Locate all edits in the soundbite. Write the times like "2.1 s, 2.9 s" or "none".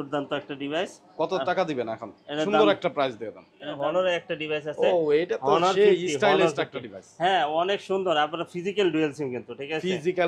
3.7 s